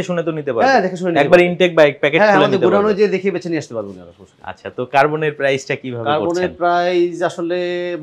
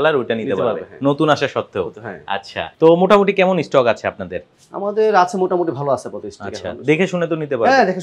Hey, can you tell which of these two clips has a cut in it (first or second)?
second